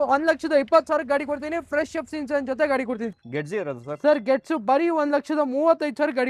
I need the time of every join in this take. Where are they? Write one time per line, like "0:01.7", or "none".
0:03.1